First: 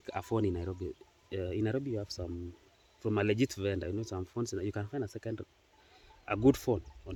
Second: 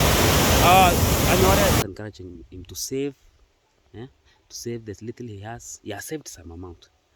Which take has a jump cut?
second; 1 cut; at 1.8 s

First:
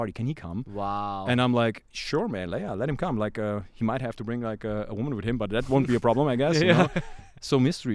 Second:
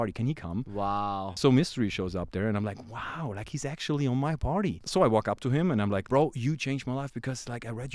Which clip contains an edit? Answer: second; 3 cuts; at 1.2 s, 4.8 s, 6.0 s

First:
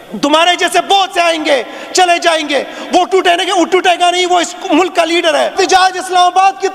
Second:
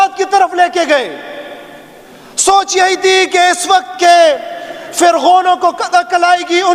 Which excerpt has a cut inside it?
first; 1 cut; at 5.5 s

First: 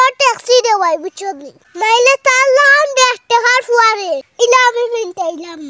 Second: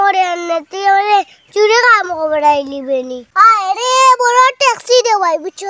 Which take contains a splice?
second; 1 cut; at 3.3 s

